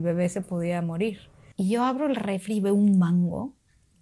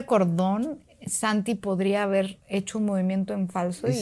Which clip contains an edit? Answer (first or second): first